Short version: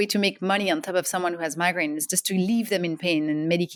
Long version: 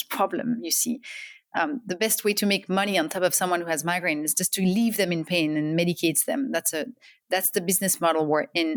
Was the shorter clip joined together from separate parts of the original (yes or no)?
no